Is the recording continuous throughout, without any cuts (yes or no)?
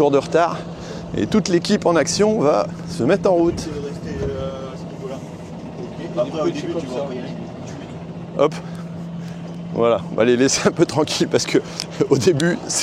yes